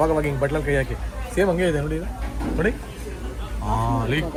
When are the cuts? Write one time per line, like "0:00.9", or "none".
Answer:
none